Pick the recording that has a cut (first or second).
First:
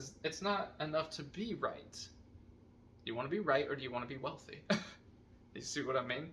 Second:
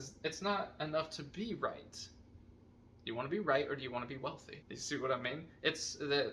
second